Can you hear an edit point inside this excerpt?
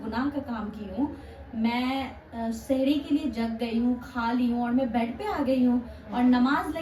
no; 0 cuts

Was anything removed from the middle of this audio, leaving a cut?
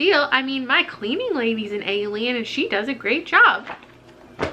no; 0 cuts

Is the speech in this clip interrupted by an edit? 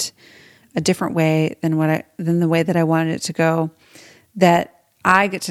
no; 0 cuts

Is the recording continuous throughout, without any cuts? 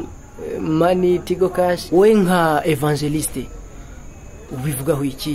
no; 1 cut; at 1.8 s

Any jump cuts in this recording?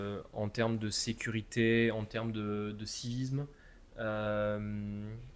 no; 0 cuts

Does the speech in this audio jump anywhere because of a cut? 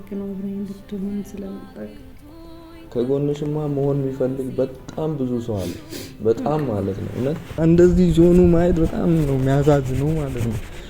yes; 1 cut; at 7.6 s

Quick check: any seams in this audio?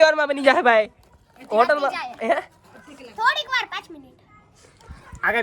no; 0 cuts

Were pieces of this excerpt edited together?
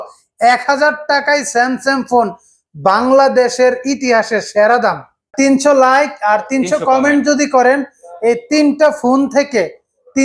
yes; 1 cut; at 5.3 s

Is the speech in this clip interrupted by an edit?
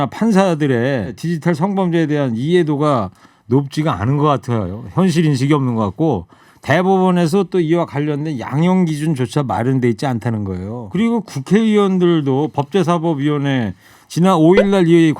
yes; 2 cuts; at 1.2 s, 10.8 s

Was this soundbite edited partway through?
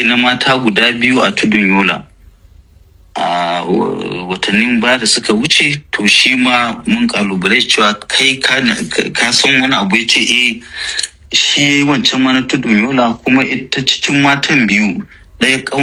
no; 0 cuts

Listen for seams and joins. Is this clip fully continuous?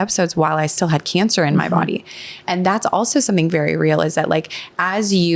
yes; 0 cuts

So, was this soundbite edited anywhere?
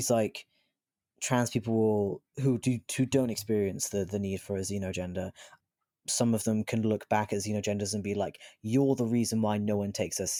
no; 0 cuts

